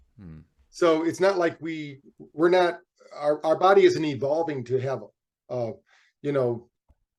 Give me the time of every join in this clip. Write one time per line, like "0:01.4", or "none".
none

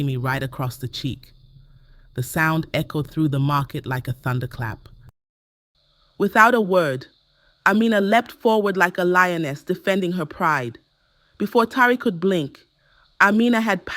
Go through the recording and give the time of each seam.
0:05.2

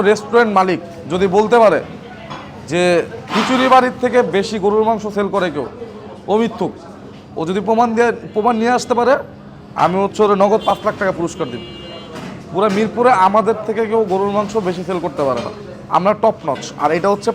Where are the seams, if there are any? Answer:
none

